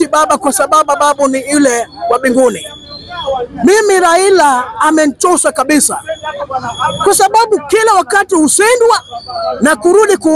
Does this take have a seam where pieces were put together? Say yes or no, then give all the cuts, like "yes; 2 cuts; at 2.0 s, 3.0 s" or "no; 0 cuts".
no; 0 cuts